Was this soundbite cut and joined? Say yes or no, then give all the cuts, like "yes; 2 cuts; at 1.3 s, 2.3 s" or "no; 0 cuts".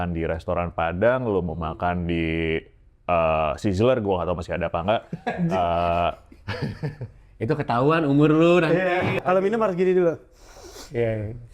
yes; 1 cut; at 9.2 s